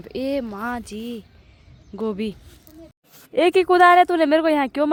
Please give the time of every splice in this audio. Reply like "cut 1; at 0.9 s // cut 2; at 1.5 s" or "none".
none